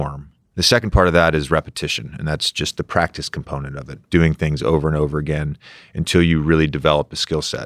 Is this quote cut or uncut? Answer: uncut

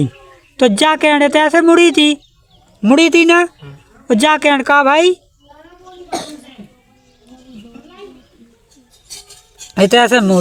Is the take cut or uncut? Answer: uncut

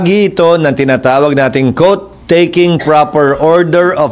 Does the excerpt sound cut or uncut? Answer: uncut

